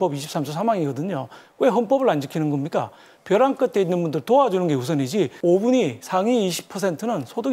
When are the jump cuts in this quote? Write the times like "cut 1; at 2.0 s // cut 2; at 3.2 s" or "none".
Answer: cut 1; at 3.1 s // cut 2; at 5.3 s